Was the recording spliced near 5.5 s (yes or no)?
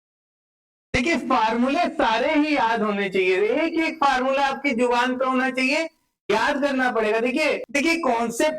no